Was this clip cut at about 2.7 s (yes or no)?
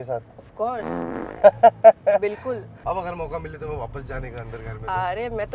yes